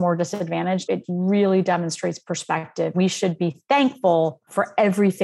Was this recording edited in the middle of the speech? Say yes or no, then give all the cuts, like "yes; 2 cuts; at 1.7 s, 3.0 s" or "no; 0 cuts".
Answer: yes; 2 cuts; at 0.9 s, 2.9 s